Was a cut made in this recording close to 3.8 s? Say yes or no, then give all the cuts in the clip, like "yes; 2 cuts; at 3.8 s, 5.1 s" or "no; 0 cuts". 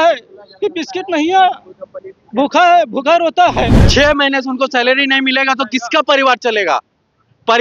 yes; 1 cut; at 3.8 s